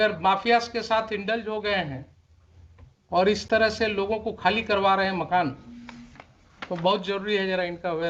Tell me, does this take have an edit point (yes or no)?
no